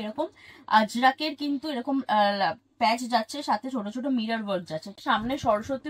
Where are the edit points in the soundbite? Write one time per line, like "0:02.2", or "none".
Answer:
0:05.0